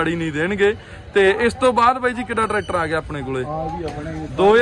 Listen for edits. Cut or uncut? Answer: uncut